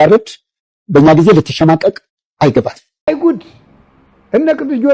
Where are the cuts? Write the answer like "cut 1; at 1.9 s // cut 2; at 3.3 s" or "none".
cut 1; at 3.1 s